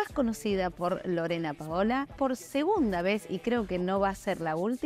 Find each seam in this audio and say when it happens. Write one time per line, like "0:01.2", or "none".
0:02.1